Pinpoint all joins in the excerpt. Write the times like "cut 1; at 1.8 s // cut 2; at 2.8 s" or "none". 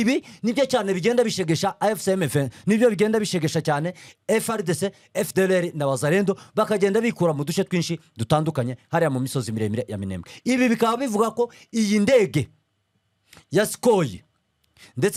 none